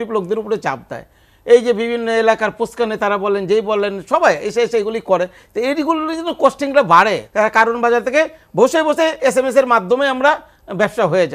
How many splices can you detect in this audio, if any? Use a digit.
1